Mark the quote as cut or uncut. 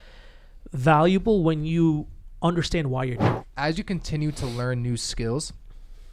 cut